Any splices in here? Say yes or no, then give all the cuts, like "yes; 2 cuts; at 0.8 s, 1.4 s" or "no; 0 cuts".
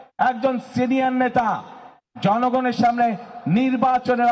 no; 0 cuts